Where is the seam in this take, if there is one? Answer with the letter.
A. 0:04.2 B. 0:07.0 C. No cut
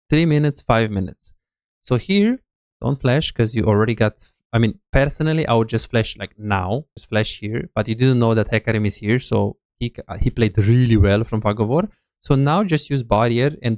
B